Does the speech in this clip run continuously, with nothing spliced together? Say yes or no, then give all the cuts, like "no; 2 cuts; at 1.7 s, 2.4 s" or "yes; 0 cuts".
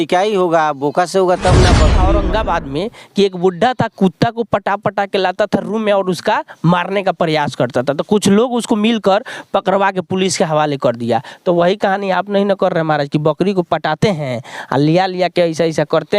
no; 1 cut; at 2.0 s